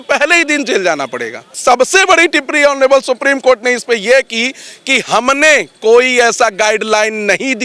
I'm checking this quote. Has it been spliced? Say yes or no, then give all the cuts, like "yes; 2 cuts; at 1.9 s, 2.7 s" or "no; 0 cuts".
yes; 1 cut; at 1.5 s